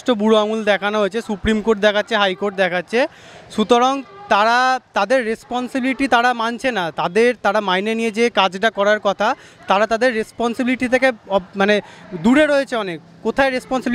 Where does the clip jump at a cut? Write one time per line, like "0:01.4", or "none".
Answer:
none